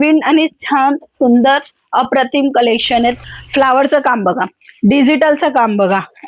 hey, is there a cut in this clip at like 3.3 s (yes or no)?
yes